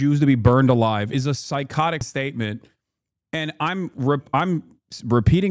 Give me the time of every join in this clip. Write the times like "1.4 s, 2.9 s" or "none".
2.0 s